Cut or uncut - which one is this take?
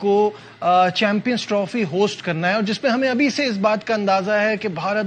uncut